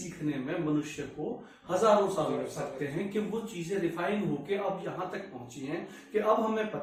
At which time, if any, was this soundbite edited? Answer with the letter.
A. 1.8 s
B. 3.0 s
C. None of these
C